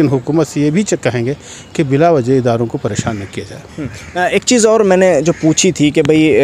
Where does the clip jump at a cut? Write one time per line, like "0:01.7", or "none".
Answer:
none